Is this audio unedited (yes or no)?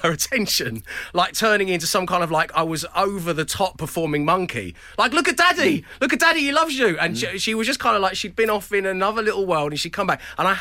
yes